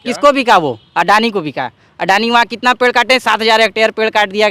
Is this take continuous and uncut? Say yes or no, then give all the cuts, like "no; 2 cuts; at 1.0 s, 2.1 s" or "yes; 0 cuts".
yes; 0 cuts